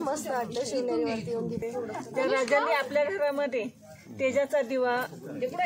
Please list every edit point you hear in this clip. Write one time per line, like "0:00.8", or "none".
0:01.6